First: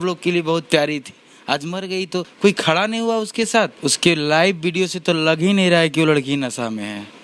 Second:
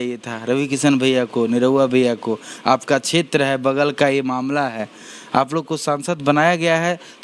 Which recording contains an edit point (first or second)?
first